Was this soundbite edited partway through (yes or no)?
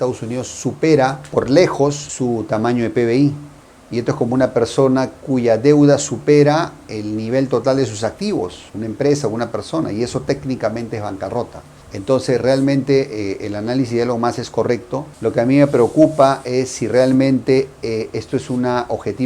no